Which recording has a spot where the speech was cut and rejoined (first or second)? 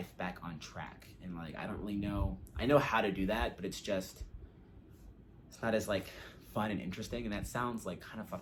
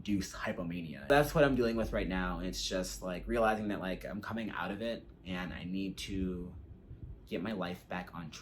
second